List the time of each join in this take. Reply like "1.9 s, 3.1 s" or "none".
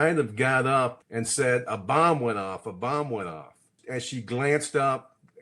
1.0 s, 3.8 s